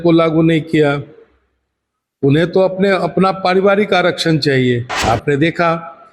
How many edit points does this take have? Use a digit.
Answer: 1